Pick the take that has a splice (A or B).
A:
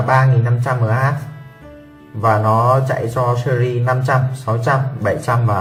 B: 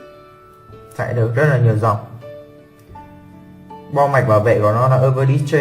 B